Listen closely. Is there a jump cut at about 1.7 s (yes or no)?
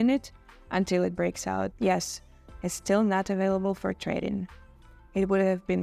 yes